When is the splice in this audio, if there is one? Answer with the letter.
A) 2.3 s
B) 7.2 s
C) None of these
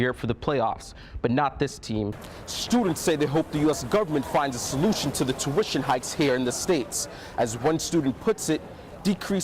A